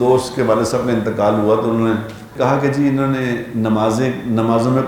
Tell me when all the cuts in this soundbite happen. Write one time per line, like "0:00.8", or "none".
0:02.3